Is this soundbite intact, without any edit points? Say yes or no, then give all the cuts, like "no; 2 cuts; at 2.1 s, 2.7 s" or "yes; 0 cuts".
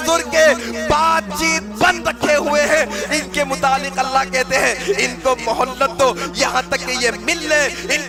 yes; 0 cuts